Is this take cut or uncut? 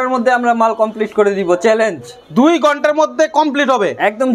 uncut